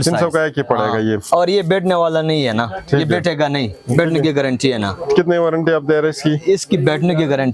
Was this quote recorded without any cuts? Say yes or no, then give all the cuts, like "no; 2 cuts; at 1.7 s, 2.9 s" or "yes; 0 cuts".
yes; 0 cuts